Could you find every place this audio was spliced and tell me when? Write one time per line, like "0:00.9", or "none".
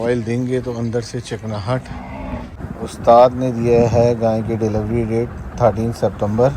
0:02.5